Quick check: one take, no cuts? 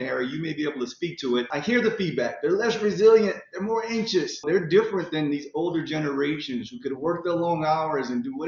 no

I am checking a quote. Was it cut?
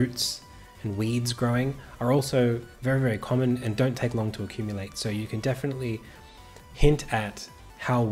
no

